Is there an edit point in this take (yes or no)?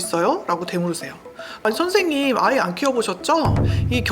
yes